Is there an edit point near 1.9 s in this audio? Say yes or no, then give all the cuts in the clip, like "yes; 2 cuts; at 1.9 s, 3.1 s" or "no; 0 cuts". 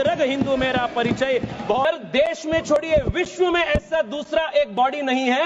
yes; 1 cut; at 1.9 s